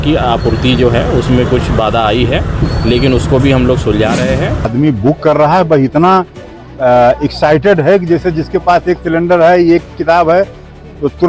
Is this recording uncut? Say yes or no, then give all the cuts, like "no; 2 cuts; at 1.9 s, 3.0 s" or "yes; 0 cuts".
no; 1 cut; at 4.7 s